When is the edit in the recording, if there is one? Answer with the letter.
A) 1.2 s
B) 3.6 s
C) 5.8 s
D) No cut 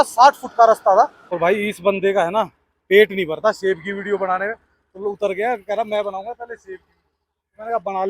A